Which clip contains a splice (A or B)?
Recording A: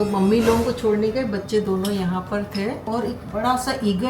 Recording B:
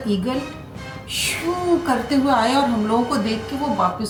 A